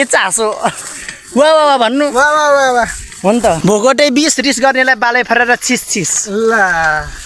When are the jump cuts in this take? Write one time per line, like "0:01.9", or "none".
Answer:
0:03.6